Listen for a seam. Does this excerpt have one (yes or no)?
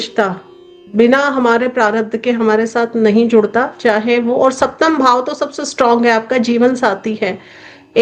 no